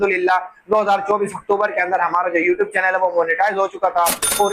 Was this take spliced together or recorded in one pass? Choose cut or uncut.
uncut